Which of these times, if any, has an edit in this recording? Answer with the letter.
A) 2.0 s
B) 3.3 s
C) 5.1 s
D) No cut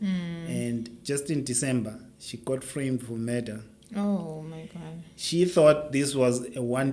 D